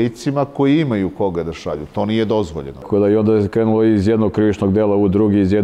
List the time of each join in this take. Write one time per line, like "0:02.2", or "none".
0:02.8